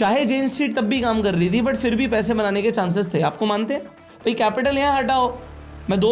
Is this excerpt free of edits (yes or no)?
no